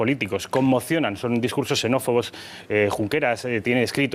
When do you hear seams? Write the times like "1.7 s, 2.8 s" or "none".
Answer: 2.1 s

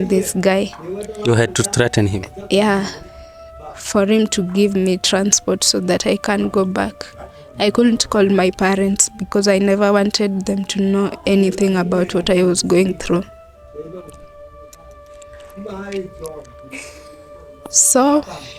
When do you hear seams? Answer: none

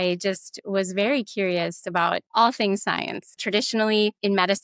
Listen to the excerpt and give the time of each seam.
2.2 s, 3.5 s

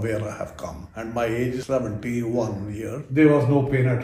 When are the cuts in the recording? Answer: 1.6 s, 3.0 s

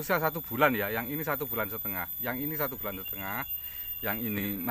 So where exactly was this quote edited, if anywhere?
none

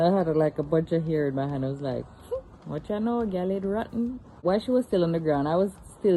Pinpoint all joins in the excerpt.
4.4 s

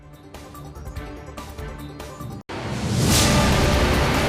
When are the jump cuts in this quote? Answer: none

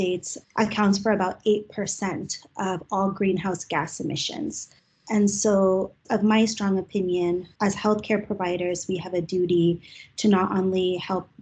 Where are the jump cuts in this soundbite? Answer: none

